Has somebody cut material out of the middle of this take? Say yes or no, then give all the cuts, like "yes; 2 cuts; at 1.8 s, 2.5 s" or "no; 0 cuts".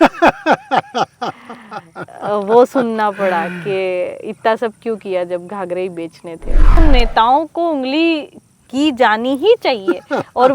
yes; 1 cut; at 6.8 s